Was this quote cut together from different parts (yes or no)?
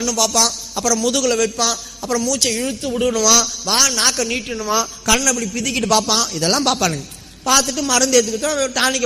no